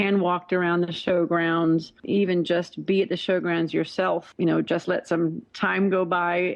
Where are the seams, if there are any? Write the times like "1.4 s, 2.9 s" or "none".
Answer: 2.0 s, 4.3 s